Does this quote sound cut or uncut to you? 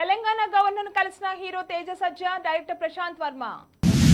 uncut